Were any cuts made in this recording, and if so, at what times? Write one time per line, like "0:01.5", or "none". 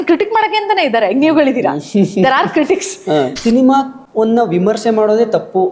0:03.4
0:04.0

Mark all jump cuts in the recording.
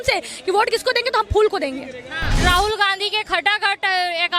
0:02.4

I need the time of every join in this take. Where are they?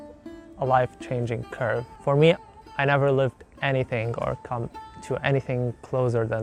none

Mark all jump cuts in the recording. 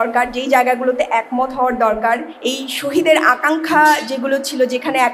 0:02.3

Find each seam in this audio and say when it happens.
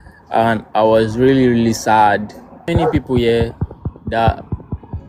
0:02.7

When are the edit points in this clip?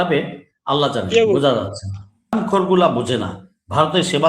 0:02.3

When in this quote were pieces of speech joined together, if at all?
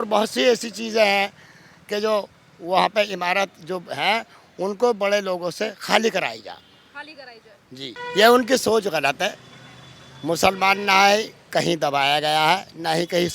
0:08.0

